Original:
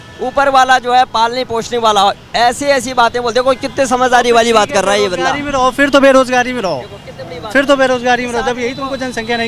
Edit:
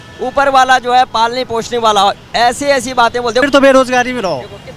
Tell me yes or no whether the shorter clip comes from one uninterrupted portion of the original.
no